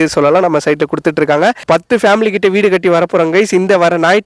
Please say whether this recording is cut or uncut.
cut